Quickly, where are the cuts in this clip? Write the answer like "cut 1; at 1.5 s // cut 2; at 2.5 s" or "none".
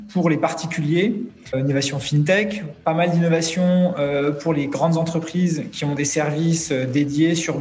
cut 1; at 1.5 s